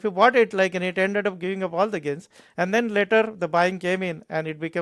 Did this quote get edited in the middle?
no; 0 cuts

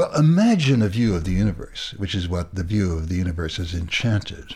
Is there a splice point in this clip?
no; 0 cuts

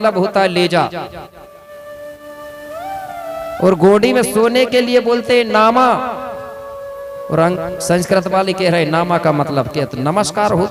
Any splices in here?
no; 0 cuts

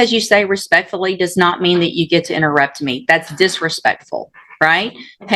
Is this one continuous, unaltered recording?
yes; 0 cuts

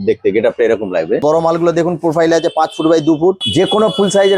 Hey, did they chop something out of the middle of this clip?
yes; 2 cuts; at 1.2 s, 3.4 s

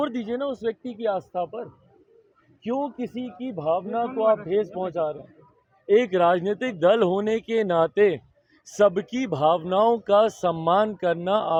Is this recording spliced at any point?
no; 0 cuts

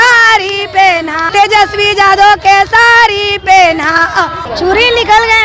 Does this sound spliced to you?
yes; 2 cuts; at 1.2 s, 4.4 s

